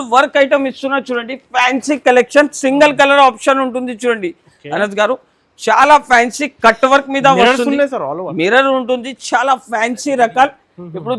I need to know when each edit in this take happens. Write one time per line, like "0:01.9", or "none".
none

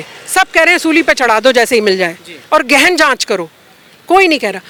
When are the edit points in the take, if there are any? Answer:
none

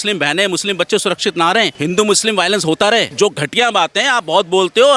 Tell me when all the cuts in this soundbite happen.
0:01.7
0:03.1

